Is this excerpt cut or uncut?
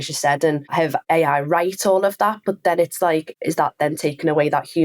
cut